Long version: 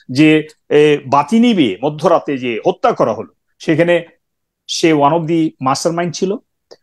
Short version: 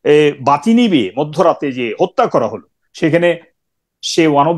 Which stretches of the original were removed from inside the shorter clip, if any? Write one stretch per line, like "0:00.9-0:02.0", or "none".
none